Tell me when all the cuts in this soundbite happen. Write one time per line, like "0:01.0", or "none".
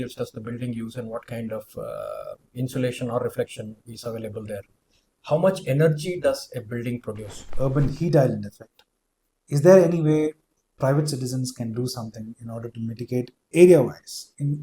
0:07.4